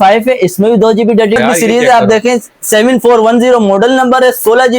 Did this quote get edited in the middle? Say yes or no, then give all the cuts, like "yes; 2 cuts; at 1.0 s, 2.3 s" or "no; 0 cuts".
yes; 1 cut; at 1.4 s